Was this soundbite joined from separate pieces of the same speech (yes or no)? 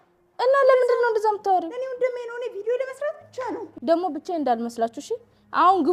yes